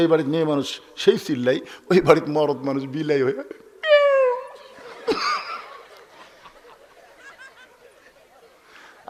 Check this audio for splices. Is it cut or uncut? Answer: uncut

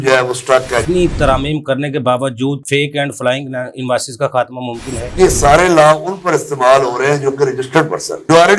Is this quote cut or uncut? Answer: cut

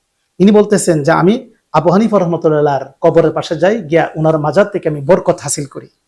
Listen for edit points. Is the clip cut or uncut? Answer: uncut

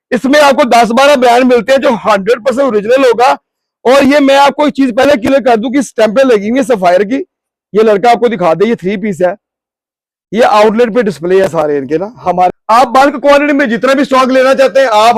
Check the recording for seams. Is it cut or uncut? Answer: cut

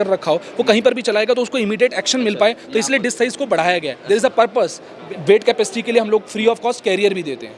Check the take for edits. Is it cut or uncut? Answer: cut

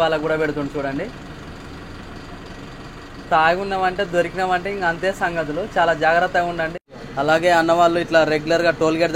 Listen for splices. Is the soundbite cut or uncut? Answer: cut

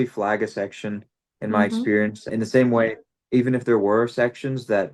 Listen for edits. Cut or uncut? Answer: cut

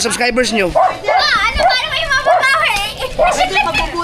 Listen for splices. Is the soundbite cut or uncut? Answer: uncut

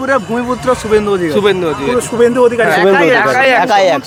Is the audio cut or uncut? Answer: uncut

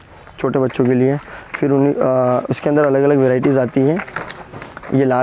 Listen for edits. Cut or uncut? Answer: uncut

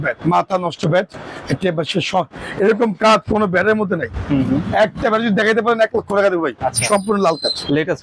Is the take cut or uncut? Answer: uncut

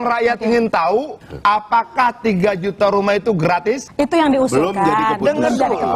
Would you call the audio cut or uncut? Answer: cut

